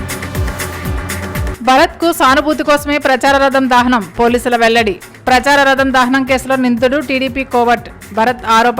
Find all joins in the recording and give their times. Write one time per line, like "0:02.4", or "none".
0:01.5